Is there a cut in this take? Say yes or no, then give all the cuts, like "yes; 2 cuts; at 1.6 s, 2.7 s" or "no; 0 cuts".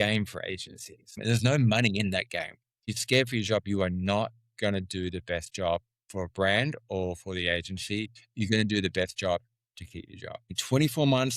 yes; 3 cuts; at 1.2 s, 2.9 s, 10.6 s